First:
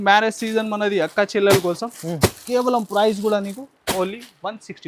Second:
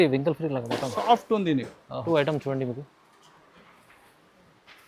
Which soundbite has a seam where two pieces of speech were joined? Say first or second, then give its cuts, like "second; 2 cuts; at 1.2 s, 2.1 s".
second; 1 cut; at 2.0 s